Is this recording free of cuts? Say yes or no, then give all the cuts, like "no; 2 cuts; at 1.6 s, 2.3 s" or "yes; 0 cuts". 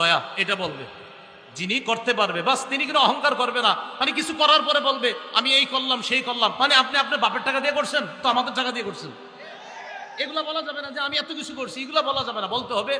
yes; 0 cuts